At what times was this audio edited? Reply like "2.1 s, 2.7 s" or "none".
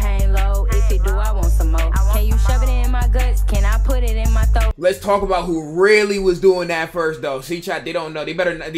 4.7 s